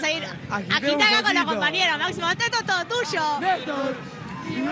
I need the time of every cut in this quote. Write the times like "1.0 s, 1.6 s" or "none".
none